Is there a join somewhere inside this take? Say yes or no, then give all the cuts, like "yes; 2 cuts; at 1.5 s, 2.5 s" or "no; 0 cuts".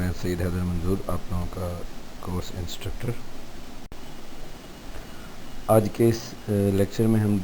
yes; 1 cut; at 3.9 s